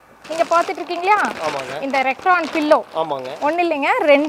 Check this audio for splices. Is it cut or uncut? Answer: uncut